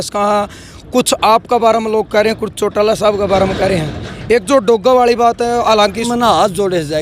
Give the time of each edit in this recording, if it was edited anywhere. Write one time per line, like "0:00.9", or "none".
0:06.1